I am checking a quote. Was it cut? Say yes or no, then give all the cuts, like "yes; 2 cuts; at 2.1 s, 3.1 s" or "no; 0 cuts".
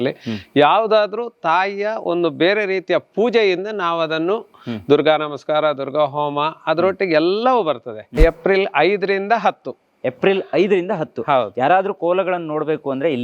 yes; 1 cut; at 8.1 s